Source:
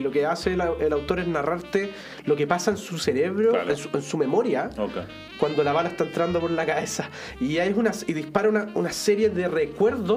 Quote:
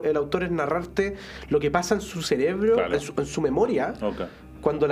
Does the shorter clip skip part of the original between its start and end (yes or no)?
no